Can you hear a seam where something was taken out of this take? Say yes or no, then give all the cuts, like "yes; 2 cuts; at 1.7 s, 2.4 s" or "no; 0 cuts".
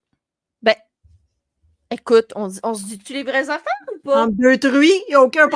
no; 0 cuts